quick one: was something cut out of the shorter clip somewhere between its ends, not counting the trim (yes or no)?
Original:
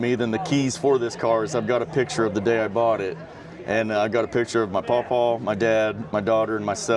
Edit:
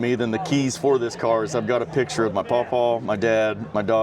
yes